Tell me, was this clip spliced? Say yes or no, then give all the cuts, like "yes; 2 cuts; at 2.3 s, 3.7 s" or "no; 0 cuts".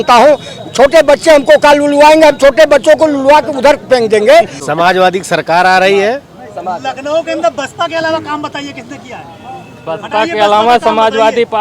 yes; 1 cut; at 4.6 s